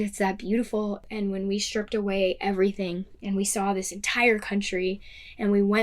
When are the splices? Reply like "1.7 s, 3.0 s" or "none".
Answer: 1.0 s